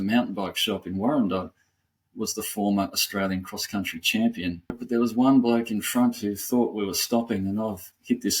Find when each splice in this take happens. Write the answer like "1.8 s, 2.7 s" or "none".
4.8 s